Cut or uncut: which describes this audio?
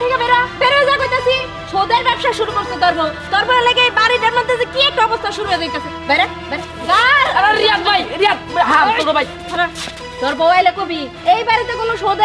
uncut